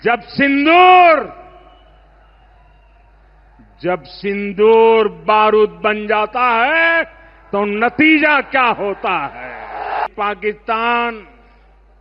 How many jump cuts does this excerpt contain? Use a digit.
1